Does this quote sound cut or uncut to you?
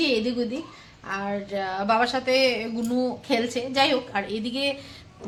uncut